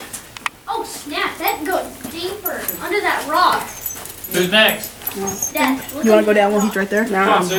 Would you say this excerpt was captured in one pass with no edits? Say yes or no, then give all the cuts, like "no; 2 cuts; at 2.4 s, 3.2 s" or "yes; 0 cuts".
yes; 0 cuts